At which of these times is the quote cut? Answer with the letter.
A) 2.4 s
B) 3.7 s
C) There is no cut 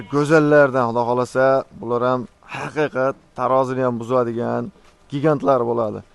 C